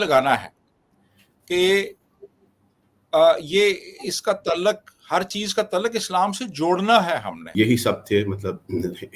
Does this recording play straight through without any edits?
no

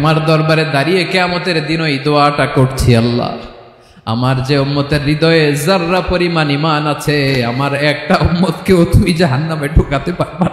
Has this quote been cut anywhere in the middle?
no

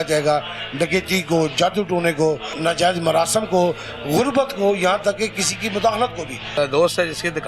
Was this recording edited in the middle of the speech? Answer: yes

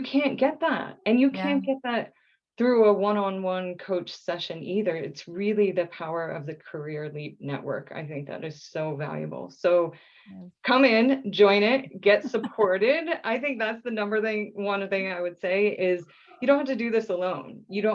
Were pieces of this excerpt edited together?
no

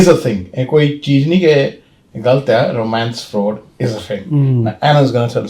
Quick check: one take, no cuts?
yes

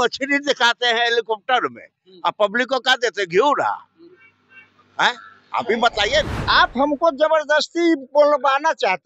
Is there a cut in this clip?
yes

